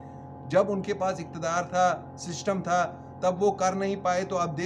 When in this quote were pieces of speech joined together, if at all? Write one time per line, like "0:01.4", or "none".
none